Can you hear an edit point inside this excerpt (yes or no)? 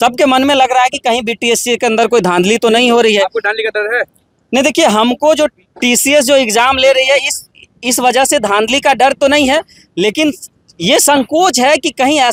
no